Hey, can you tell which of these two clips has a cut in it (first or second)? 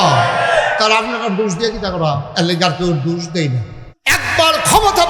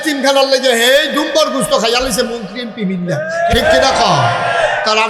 first